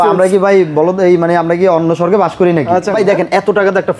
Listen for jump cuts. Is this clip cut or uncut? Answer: cut